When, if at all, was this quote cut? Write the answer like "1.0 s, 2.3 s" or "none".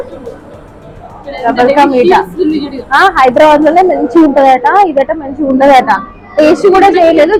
none